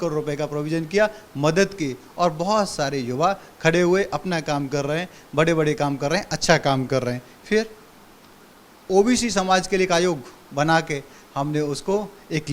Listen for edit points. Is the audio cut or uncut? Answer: uncut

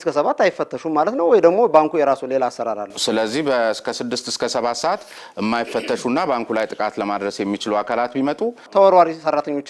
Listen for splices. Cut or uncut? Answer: cut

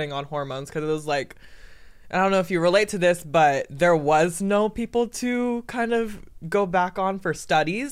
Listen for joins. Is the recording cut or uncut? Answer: uncut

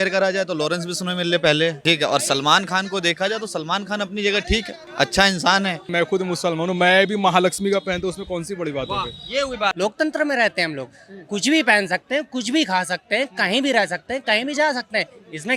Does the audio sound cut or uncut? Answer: cut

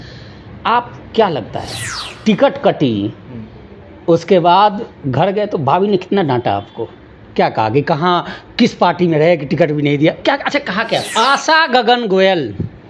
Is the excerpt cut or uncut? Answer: cut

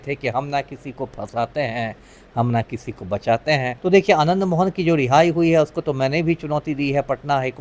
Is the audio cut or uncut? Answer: cut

